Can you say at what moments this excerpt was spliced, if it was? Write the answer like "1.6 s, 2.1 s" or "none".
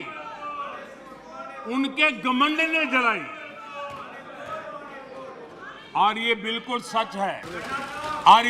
7.5 s